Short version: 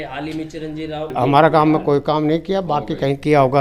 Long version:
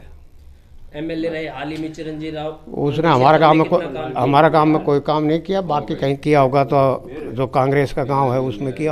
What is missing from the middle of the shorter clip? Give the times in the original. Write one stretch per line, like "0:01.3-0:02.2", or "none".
0:02.5-0:04.0